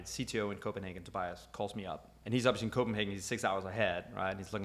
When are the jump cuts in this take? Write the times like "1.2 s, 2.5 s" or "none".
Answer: 2.1 s